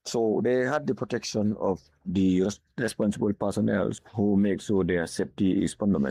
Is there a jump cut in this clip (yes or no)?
no